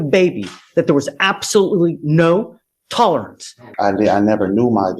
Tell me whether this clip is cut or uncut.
cut